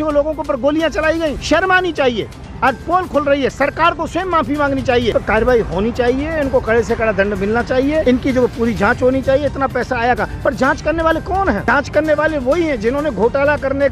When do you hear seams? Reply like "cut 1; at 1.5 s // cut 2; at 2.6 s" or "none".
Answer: cut 1; at 1.4 s // cut 2; at 5.1 s // cut 3; at 8.0 s // cut 4; at 11.6 s